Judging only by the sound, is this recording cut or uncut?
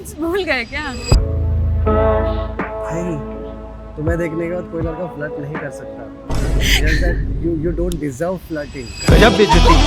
uncut